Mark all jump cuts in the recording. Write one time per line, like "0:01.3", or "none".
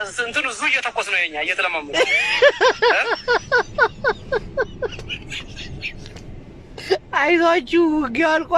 0:01.8